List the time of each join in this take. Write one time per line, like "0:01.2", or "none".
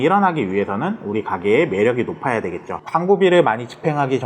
0:02.8